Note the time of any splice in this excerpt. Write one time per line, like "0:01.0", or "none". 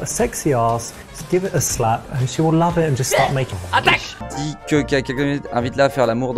0:04.2

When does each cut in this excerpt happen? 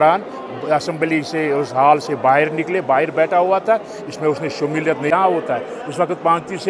0:05.1

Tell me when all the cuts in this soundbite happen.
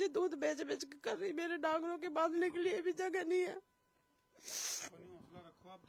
none

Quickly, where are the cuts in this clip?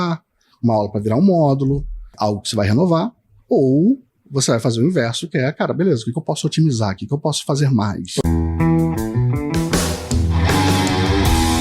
0:02.1
0:08.2

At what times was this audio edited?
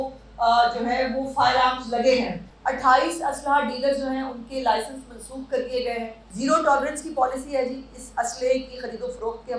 0:02.5
0:06.2

